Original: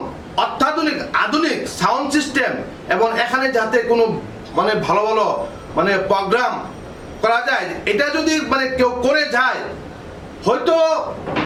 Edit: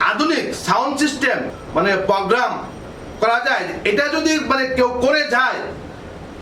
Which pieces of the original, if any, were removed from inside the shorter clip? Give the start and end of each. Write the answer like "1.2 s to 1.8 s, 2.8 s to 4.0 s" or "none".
2.7 s to 5.6 s